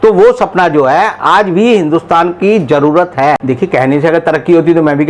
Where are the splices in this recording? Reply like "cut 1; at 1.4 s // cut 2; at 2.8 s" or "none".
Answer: cut 1; at 3.4 s